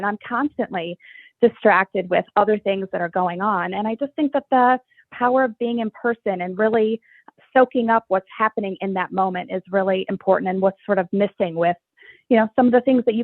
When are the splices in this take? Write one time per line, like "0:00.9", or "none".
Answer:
none